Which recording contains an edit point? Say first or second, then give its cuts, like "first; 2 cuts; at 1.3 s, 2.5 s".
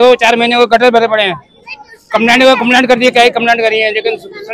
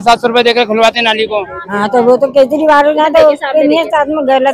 second; 1 cut; at 1.6 s